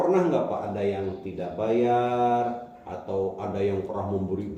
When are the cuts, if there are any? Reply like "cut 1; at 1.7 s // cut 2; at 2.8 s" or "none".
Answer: none